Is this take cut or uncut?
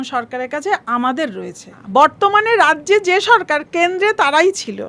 cut